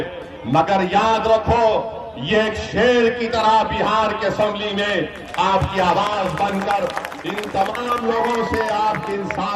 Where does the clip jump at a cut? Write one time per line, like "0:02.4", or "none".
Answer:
none